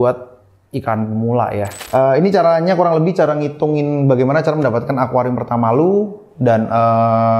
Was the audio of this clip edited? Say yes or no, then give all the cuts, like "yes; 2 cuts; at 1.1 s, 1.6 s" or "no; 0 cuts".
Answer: yes; 1 cut; at 1.7 s